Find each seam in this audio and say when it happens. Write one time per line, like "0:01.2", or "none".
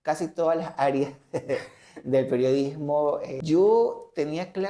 0:03.4